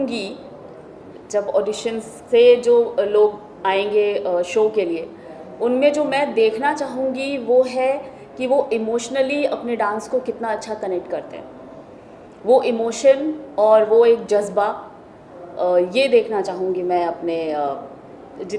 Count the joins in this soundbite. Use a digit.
0